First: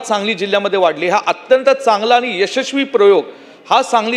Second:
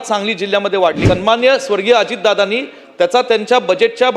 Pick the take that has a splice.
second; 1 cut; at 1.0 s

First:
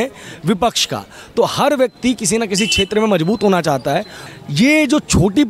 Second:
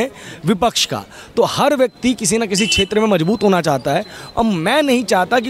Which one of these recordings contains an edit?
first; 1 cut; at 4.2 s

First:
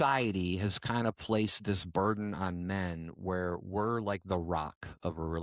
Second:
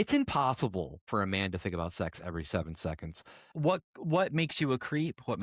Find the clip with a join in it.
second; 2 cuts; at 1.0 s, 3.4 s

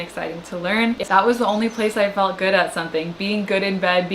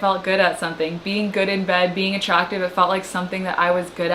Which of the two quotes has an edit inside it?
first; 1 cut; at 1.0 s

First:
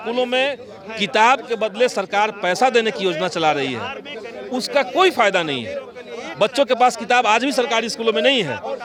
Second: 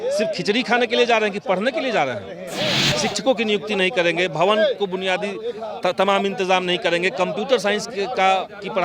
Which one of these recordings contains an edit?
second; 1 cut; at 2.8 s

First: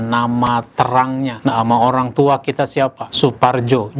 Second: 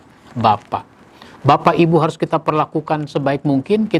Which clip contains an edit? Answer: first; 2 cuts; at 1.4 s, 3.0 s

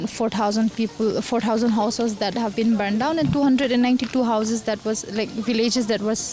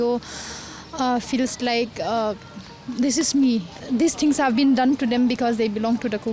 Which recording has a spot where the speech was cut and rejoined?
second; 1 cut; at 3.8 s

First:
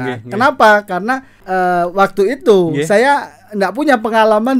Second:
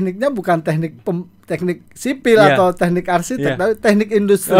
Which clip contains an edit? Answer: first; 1 cut; at 1.3 s

